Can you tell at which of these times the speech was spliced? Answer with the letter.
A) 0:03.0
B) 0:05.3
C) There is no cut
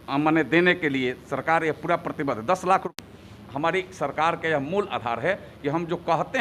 A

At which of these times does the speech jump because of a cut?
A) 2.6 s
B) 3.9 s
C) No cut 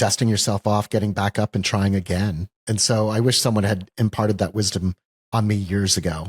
A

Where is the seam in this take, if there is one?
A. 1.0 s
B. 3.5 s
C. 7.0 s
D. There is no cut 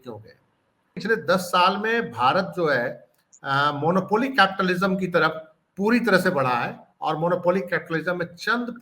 A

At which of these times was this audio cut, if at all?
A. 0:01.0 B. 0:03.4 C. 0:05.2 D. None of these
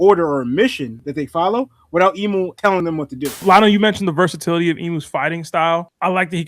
B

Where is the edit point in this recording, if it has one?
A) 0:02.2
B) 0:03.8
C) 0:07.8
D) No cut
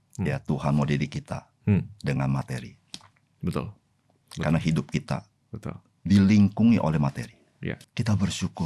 C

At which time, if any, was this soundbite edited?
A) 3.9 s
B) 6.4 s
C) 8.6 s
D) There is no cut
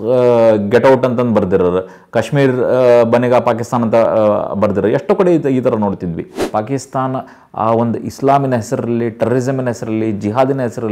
B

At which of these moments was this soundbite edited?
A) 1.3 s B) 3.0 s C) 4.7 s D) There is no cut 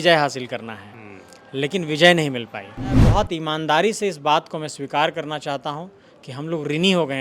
B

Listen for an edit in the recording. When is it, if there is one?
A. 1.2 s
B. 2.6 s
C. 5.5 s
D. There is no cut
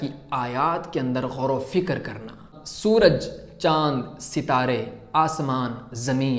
D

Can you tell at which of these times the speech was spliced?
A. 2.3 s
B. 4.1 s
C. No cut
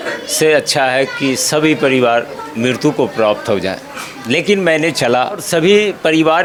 C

